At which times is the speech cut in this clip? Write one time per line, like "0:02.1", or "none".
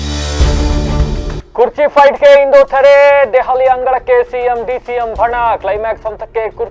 0:01.4